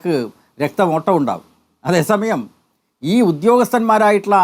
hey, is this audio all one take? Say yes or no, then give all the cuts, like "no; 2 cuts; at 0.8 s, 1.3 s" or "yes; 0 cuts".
yes; 0 cuts